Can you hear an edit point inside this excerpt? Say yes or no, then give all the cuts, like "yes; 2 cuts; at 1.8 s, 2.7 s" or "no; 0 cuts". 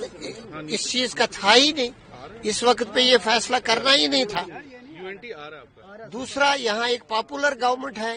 no; 0 cuts